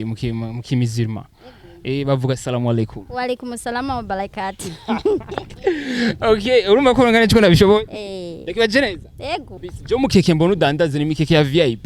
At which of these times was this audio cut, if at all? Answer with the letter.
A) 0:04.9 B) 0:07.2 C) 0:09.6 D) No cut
C